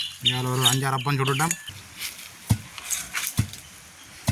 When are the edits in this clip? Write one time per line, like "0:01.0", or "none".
0:01.8